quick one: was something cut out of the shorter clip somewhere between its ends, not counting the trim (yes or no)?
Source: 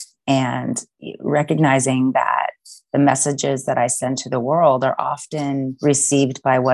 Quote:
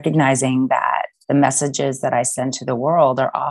yes